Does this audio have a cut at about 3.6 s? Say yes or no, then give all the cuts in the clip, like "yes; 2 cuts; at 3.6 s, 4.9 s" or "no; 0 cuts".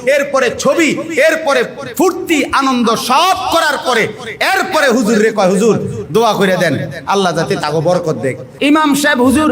no; 1 cut; at 8.5 s